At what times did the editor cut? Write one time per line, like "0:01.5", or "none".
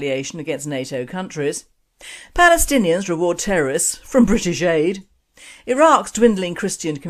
0:04.6